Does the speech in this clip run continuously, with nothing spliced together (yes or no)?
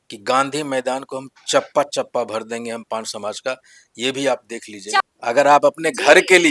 no